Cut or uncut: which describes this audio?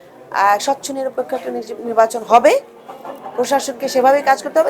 uncut